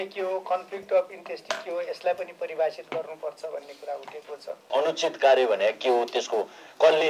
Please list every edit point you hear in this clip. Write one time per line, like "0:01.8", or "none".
0:04.7